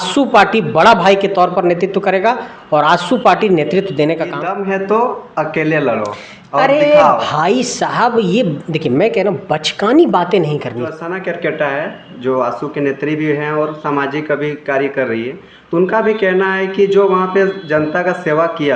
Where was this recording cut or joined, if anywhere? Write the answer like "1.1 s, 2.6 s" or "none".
4.4 s, 11.0 s